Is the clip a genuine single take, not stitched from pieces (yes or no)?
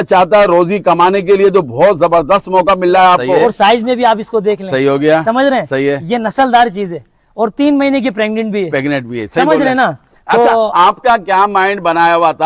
no